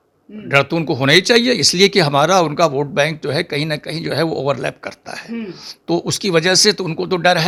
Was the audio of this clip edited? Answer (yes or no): no